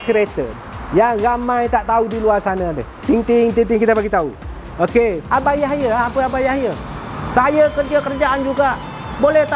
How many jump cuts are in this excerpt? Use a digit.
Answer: 1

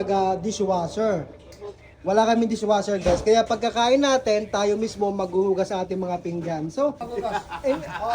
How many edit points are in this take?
1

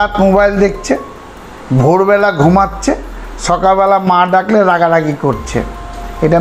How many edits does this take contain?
0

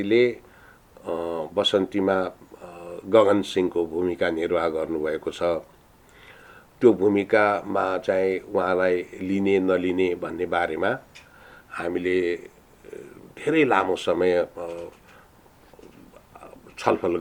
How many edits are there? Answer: 0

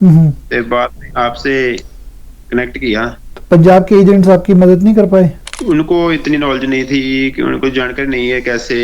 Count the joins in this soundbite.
2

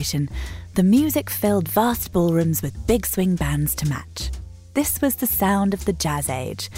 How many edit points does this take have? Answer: 1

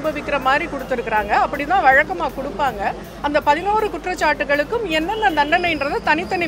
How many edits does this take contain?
0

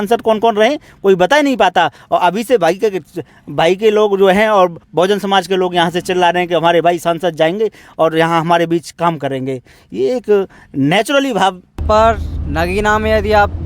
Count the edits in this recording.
1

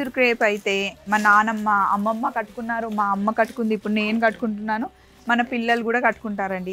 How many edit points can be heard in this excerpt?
0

